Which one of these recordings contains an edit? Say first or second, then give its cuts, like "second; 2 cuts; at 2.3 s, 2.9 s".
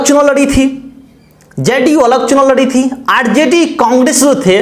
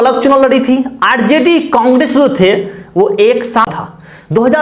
second; 1 cut; at 3.7 s